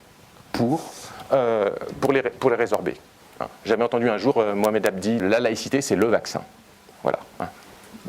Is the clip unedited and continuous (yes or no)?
no